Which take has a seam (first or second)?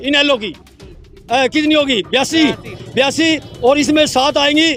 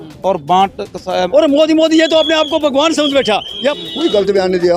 second